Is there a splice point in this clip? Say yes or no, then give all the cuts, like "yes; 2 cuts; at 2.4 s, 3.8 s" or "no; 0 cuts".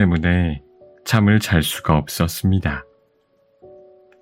no; 0 cuts